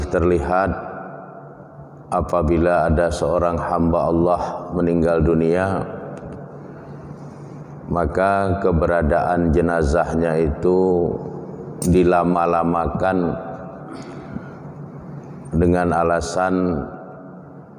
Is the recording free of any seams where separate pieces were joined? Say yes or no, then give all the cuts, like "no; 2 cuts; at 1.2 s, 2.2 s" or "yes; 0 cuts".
yes; 0 cuts